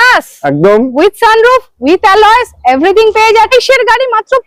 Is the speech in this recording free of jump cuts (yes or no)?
no